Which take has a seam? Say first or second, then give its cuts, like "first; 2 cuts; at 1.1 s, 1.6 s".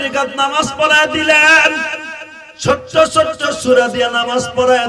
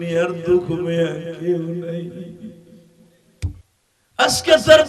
second; 1 cut; at 3.6 s